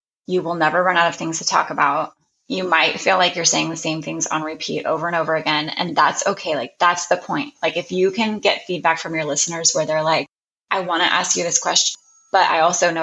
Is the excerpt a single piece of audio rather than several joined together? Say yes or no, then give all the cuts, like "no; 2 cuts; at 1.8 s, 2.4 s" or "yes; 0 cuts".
yes; 0 cuts